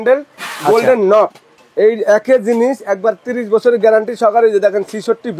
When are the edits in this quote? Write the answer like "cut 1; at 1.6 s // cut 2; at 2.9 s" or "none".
cut 1; at 1.6 s